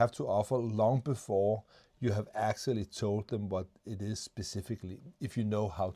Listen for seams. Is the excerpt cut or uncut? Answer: uncut